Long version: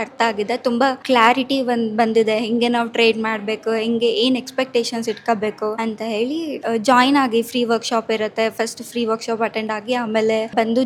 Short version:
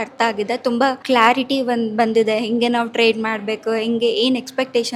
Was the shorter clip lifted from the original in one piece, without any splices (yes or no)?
yes